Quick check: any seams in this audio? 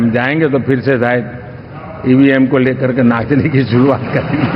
no; 0 cuts

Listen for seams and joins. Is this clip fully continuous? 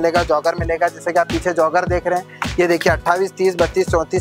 yes; 0 cuts

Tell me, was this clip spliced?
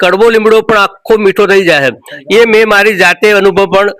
no; 0 cuts

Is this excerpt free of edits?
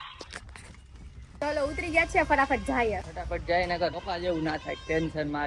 no; 3 cuts; at 1.4 s, 3.2 s, 4.1 s

